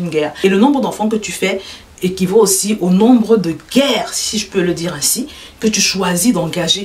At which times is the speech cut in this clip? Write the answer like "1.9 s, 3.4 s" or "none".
none